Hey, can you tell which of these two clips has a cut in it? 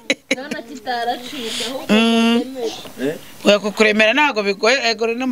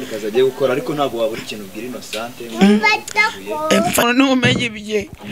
second; 1 cut; at 4.0 s

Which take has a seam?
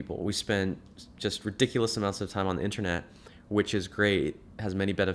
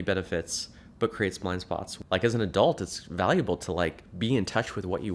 second; 1 cut; at 1.9 s

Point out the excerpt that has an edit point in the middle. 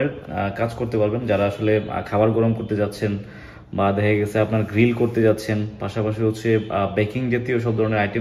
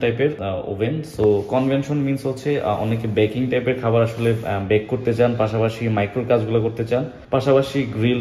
second; 1 cut; at 7.2 s

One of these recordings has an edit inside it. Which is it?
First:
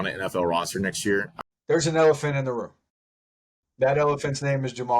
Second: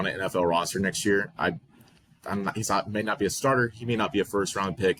first; 1 cut; at 1.3 s

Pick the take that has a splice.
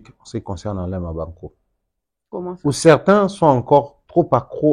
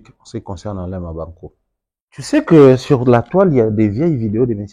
second; 1 cut; at 2.3 s

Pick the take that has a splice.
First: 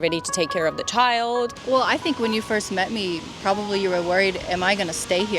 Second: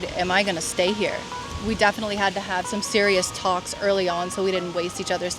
first; 1 cut; at 1.6 s

